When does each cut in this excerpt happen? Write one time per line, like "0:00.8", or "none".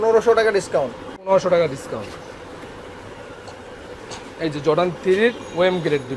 none